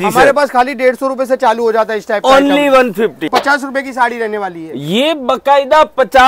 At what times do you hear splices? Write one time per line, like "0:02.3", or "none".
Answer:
0:03.3